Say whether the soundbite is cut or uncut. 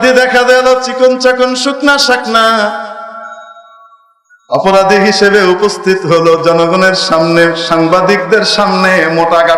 uncut